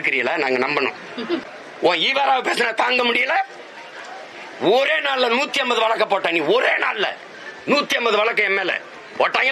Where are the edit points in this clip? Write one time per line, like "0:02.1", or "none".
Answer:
0:01.5

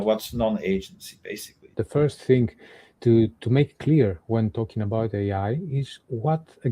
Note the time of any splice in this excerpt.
0:01.6

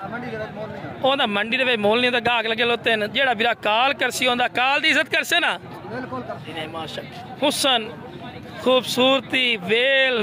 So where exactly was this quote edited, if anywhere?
0:06.6

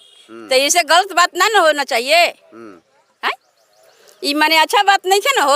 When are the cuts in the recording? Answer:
none

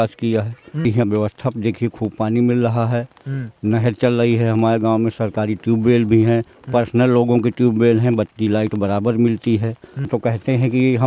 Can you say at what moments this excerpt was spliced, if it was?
0:00.8
0:10.1

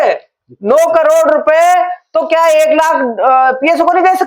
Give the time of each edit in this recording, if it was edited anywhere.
none

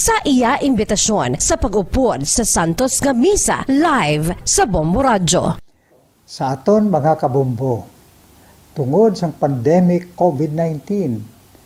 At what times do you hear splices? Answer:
none

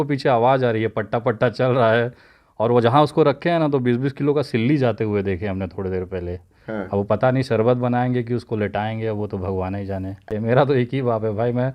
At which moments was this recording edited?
0:10.2

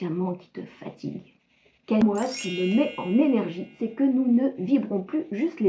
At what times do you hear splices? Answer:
0:02.0

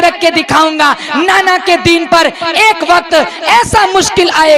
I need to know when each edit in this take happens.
none

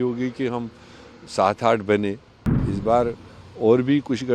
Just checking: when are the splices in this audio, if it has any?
0:02.5

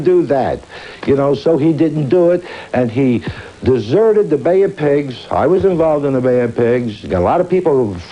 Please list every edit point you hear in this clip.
0:04.2

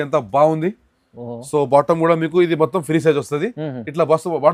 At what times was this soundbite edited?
none

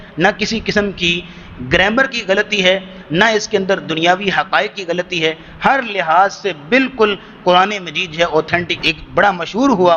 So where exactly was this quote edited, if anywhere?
0:08.7

